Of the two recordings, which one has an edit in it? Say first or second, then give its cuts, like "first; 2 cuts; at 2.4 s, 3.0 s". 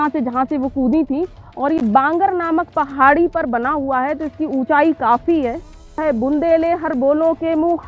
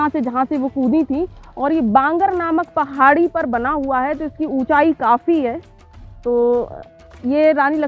first; 1 cut; at 6.0 s